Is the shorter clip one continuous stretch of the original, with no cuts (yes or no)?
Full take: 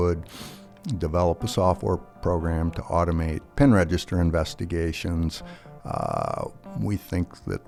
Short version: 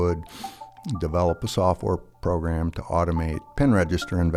yes